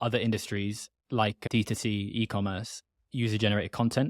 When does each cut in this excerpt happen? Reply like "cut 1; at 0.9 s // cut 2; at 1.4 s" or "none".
cut 1; at 3.0 s